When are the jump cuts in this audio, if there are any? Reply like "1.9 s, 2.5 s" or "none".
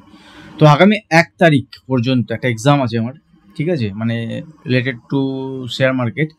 none